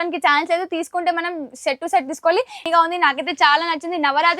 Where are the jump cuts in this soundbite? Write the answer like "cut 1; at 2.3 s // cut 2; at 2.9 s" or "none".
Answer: cut 1; at 2.6 s